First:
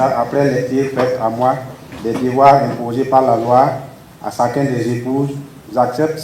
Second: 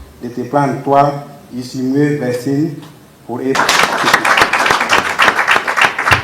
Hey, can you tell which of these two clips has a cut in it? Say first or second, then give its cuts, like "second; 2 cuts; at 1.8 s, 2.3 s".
second; 1 cut; at 3.6 s